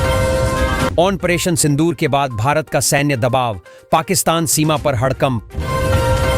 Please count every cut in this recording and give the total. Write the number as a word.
two